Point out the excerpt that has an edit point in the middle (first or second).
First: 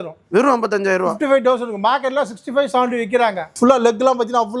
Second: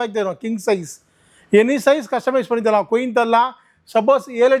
first